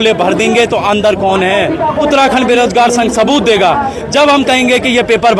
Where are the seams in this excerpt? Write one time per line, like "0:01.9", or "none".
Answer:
0:02.1